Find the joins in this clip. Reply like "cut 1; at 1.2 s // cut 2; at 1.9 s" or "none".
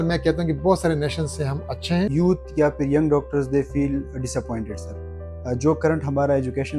cut 1; at 2.1 s